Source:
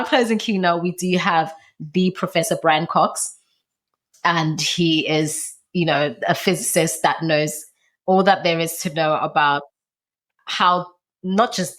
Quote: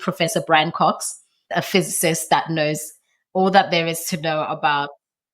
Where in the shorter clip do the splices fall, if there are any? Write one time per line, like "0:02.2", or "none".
0:01.4